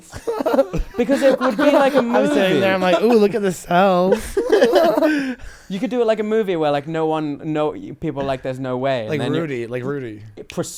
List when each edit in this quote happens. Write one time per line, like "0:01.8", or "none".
none